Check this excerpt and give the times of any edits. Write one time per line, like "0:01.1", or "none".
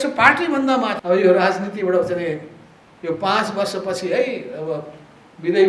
0:01.0